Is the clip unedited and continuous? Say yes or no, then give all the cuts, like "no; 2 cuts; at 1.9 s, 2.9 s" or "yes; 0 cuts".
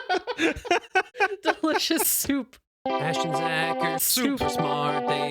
no; 1 cut; at 2.7 s